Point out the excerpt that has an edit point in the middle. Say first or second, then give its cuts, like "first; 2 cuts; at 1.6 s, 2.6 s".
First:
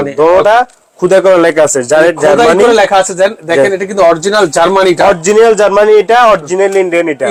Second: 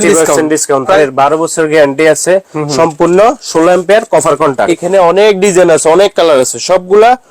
second; 2 cuts; at 1.0 s, 4.8 s